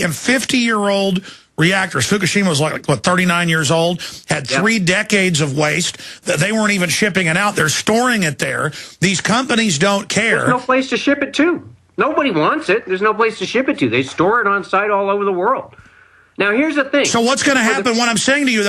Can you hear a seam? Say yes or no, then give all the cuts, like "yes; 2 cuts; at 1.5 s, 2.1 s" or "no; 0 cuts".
yes; 1 cut; at 16.6 s